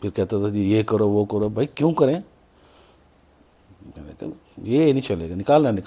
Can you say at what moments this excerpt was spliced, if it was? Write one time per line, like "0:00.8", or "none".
none